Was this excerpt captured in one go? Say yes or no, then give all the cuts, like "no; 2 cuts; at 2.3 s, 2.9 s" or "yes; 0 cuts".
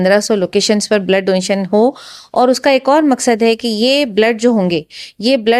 yes; 0 cuts